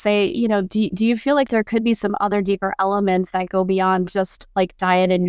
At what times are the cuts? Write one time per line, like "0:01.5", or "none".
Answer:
none